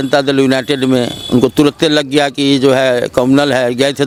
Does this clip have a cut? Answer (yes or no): no